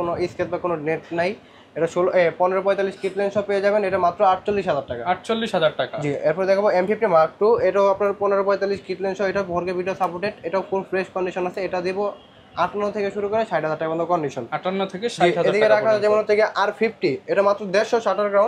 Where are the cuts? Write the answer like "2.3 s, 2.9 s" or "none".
none